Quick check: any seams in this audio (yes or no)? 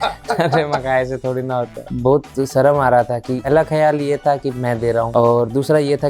yes